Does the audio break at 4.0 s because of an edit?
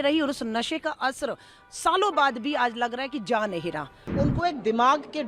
yes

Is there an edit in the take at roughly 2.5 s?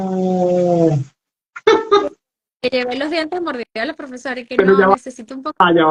no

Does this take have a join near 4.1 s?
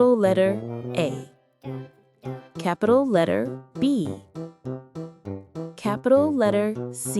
yes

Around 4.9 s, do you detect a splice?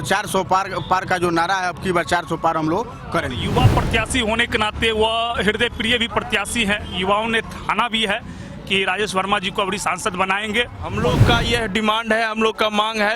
no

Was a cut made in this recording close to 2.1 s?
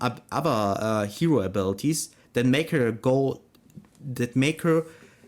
no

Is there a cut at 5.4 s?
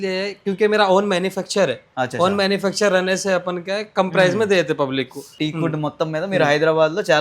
yes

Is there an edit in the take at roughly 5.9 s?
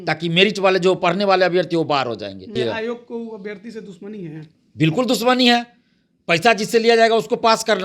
no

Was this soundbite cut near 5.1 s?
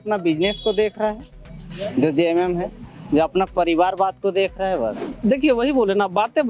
yes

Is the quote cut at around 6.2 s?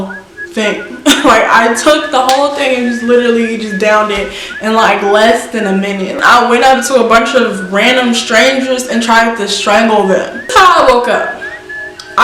yes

